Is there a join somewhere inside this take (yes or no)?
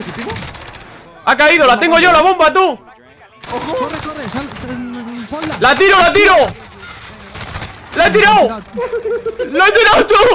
no